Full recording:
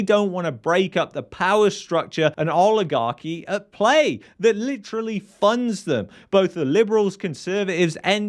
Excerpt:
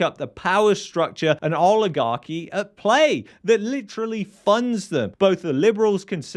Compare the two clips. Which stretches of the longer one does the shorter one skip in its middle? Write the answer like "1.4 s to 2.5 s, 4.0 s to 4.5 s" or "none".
6.1 s to 6.2 s

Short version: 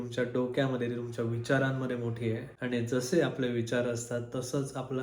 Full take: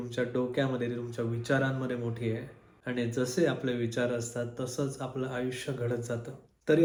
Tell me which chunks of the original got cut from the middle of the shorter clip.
2.5 s to 2.8 s

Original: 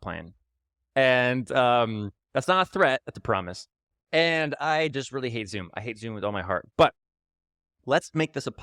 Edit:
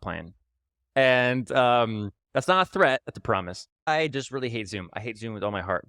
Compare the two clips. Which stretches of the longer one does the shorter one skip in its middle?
3.8 s to 4.6 s

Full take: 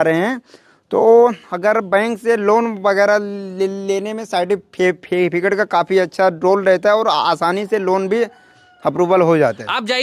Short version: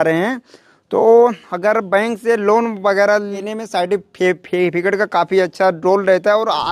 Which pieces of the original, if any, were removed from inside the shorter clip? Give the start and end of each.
3.5 s to 4.0 s

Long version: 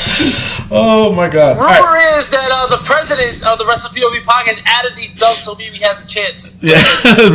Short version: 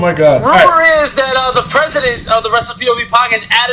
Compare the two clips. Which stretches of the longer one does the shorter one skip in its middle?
none

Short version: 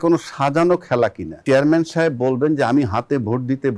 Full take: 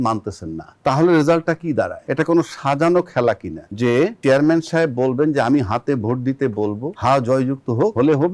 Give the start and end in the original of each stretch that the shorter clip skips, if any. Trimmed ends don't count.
3.6 s to 4.2 s

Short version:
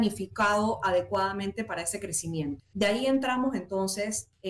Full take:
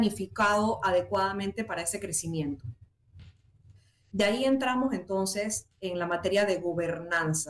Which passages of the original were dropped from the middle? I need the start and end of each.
2.7 s to 4.0 s

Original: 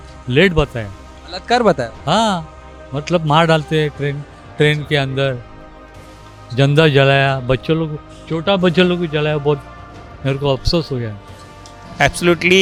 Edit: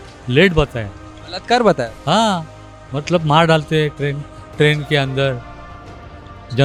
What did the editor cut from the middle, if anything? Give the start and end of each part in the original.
none

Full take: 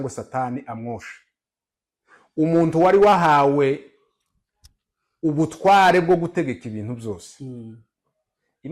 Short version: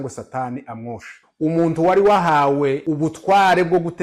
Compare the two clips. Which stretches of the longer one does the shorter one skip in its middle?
1.2 s to 2.1 s, 3.8 s to 5.2 s

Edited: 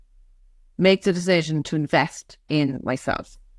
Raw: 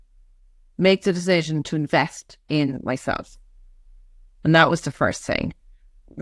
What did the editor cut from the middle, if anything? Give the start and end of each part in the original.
none

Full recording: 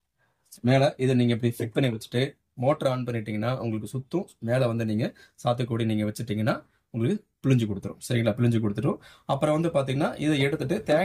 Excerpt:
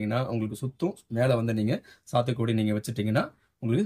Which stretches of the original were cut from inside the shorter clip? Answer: none

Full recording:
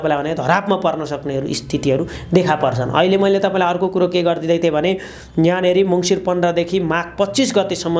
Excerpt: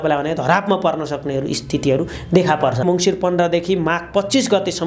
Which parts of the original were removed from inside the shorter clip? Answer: 2.8 s to 5.9 s

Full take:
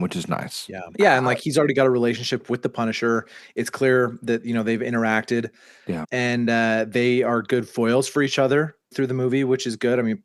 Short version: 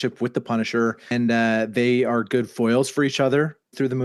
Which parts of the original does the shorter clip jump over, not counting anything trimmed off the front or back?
3.4 s to 6.3 s

